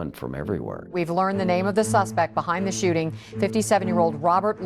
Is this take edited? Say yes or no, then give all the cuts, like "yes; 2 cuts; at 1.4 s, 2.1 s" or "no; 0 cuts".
yes; 1 cut; at 0.9 s